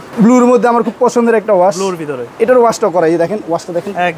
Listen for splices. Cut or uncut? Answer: cut